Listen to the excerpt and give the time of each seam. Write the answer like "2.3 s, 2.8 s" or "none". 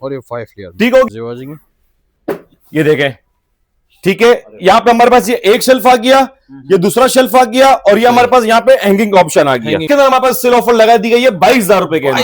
1.1 s, 9.8 s